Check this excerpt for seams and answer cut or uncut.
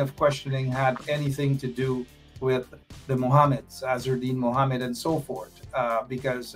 uncut